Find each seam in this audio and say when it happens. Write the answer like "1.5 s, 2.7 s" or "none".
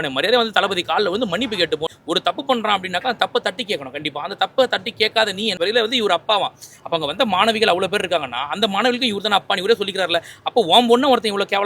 1.9 s, 5.5 s